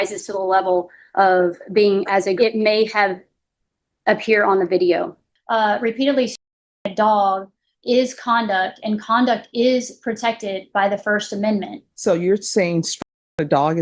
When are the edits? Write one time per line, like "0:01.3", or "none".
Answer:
0:02.4
0:05.2
0:11.8